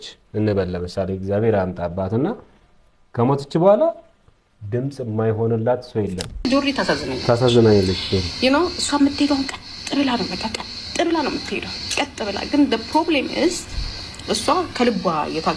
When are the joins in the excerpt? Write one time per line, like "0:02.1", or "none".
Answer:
0:06.3